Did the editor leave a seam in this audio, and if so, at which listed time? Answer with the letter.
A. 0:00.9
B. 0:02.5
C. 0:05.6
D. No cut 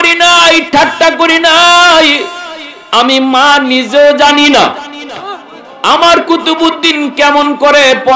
D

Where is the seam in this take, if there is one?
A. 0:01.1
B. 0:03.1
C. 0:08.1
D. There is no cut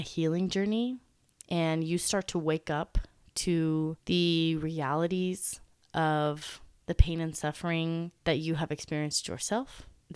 C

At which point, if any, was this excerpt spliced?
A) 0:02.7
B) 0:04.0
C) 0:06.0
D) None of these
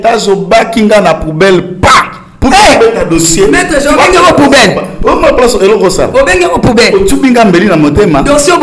D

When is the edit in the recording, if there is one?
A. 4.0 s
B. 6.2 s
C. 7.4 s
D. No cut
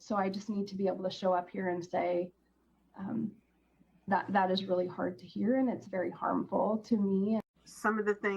C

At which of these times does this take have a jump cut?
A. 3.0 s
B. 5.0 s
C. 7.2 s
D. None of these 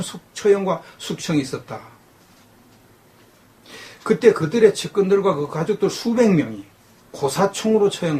B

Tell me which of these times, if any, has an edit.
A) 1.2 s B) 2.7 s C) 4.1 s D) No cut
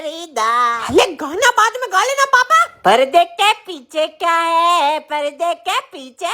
D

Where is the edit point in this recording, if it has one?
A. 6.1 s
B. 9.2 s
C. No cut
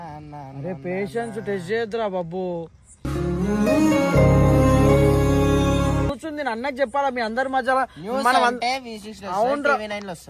A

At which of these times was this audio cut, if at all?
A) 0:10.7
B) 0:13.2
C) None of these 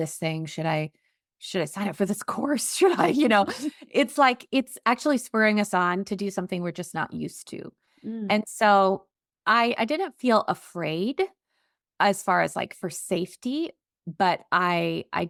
C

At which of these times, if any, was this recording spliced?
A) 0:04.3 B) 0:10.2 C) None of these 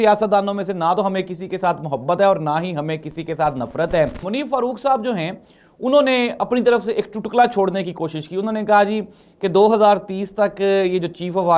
A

